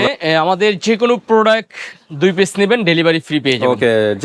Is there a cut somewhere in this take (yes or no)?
no